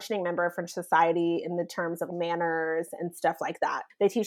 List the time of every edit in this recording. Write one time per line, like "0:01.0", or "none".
none